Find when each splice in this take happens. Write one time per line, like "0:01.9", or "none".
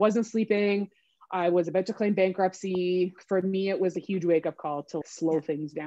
0:03.2
0:05.0

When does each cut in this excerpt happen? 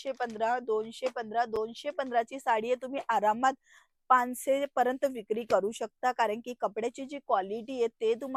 none

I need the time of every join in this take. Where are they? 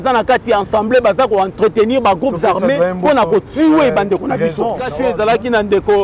0:04.9

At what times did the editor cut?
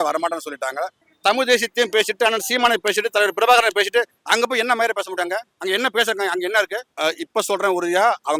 0:01.0
0:06.8

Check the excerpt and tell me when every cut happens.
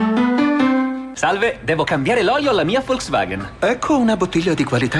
0:01.1

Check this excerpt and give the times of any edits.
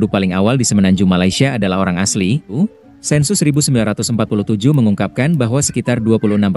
0:02.5

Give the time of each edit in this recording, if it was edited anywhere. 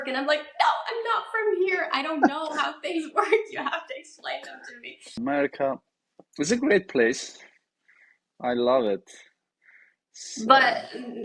0:05.2

